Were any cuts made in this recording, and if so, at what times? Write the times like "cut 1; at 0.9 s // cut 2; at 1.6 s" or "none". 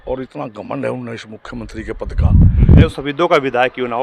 cut 1; at 2.9 s